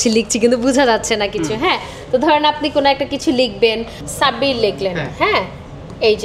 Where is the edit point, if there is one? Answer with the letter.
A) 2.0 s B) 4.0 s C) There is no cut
B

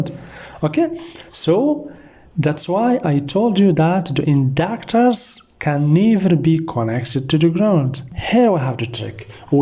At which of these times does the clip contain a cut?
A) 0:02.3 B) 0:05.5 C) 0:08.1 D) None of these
C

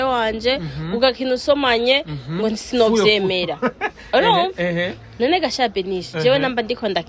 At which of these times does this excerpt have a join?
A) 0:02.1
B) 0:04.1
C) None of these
C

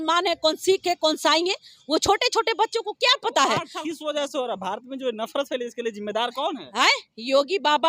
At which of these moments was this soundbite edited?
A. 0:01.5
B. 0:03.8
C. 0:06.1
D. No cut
B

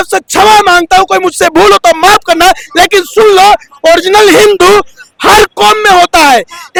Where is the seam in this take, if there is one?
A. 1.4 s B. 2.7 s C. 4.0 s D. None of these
D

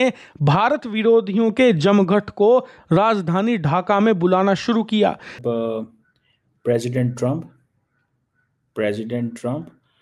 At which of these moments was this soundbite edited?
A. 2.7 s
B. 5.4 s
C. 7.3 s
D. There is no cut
B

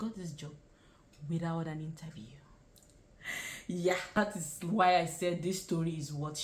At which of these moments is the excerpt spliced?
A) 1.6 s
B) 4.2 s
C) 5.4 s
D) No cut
B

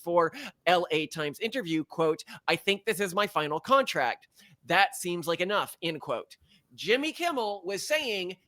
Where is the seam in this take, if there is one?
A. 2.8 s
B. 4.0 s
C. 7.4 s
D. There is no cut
D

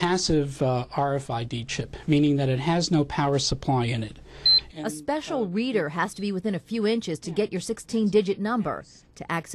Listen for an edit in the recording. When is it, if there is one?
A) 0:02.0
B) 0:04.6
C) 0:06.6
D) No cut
B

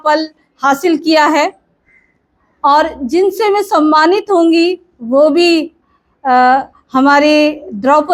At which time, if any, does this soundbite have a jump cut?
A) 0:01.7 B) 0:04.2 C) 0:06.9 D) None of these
D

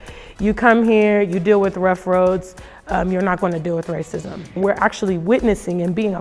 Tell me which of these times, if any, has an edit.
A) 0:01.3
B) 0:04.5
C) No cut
B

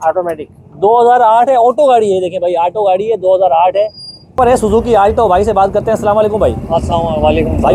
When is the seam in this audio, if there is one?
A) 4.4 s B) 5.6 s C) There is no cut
A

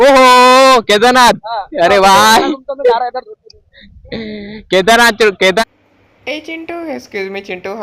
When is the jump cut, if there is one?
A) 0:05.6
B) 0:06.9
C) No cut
A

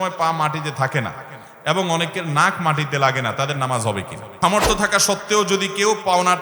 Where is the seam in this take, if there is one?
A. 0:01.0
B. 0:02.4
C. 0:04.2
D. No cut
C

